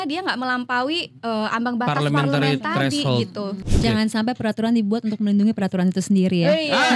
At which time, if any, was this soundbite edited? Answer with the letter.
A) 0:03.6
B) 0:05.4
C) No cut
A